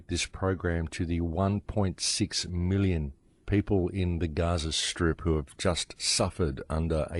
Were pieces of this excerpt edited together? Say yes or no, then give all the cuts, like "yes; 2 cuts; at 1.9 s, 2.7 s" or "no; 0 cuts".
no; 0 cuts